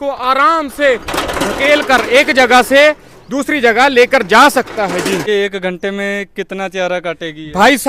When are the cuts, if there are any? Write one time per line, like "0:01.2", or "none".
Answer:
none